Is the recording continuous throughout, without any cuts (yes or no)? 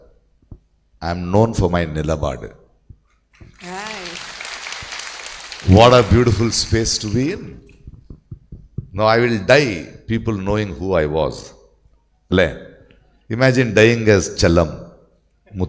yes